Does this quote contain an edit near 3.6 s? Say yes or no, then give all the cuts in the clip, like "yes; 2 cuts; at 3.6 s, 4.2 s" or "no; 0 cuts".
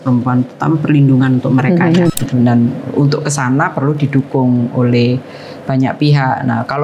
no; 1 cut; at 2.1 s